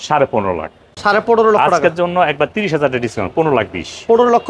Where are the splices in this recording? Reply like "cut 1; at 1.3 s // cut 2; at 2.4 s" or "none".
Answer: none